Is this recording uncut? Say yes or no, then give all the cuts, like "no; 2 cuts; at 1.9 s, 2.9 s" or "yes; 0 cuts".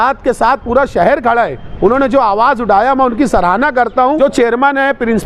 no; 1 cut; at 4.2 s